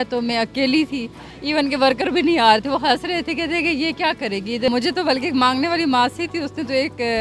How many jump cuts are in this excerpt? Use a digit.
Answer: 1